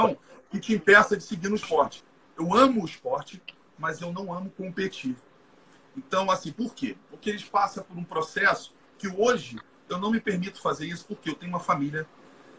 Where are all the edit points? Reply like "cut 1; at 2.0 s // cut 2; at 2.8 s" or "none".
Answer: cut 1; at 2.0 s